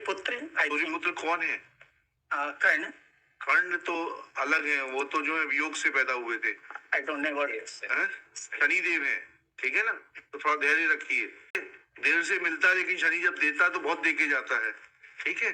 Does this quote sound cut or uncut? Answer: cut